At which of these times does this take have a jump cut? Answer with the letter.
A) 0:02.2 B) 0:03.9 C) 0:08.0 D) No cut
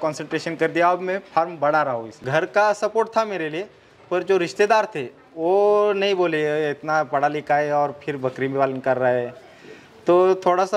A